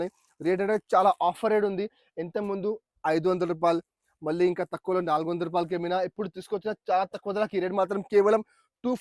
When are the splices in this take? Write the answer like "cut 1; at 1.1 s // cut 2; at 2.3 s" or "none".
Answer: none